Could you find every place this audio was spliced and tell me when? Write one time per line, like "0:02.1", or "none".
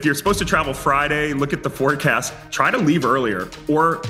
none